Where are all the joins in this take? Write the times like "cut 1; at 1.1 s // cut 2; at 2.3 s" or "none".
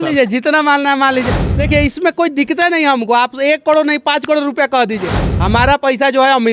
none